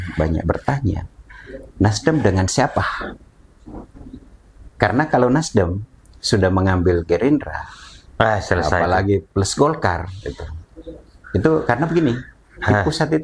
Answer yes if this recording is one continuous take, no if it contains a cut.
yes